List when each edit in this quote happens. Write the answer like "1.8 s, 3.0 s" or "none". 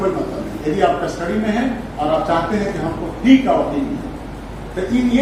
none